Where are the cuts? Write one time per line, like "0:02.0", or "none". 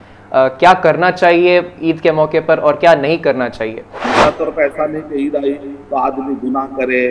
0:04.1